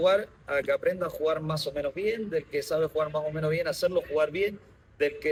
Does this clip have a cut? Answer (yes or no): no